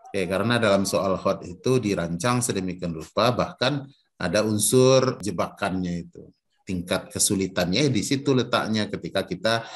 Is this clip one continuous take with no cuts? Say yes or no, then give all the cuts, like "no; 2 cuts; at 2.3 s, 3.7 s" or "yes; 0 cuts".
yes; 0 cuts